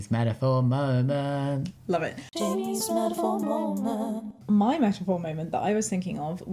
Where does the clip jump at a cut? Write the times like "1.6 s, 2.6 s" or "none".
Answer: none